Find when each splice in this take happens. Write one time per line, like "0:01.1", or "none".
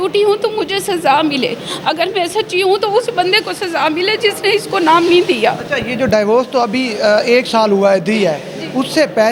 none